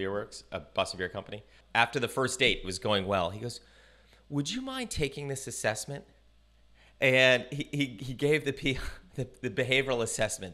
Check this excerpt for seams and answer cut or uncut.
cut